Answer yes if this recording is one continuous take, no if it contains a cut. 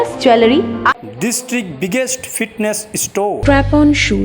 no